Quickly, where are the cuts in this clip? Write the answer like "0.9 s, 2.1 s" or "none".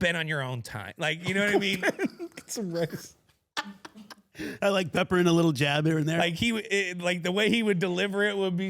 6.2 s